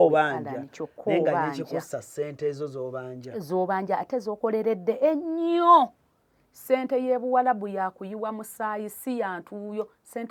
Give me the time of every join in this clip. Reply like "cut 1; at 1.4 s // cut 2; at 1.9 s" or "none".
none